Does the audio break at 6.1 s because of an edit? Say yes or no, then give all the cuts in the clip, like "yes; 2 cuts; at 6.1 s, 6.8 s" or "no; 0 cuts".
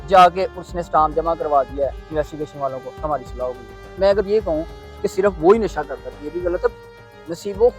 no; 1 cut; at 3.9 s